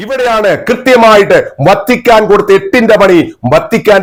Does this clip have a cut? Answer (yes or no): no